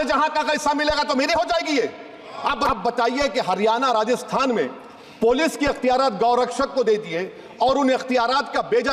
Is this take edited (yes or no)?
yes